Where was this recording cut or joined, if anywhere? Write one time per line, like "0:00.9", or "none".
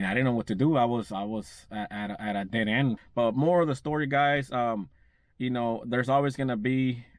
0:03.0

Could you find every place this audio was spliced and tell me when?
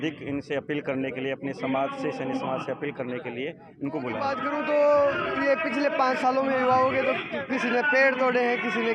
0:04.4

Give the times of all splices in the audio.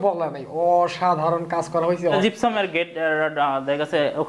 0:02.0

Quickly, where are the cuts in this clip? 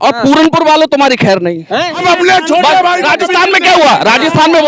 0:02.0

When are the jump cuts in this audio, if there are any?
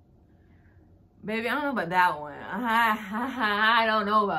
none

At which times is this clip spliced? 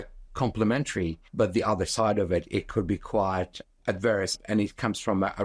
0:01.2
0:04.4

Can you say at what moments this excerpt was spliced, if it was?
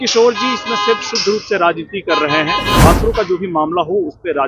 0:02.8

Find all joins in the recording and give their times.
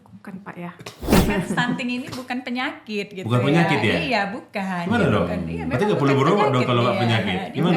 0:01.1

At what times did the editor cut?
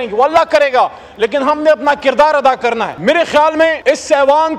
0:02.9
0:03.8

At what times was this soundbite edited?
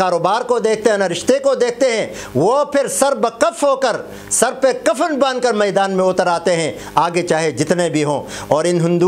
none

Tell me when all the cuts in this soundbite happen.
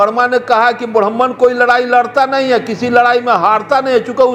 none

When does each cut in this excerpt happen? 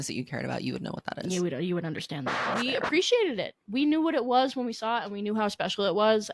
0:02.5

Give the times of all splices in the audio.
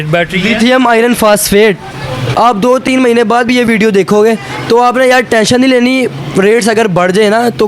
0:02.2

